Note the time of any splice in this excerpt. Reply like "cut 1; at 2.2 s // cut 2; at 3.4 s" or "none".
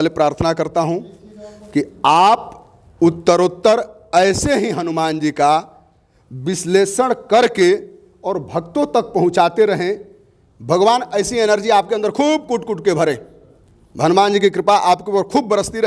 none